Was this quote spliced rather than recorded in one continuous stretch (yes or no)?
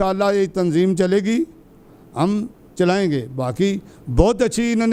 no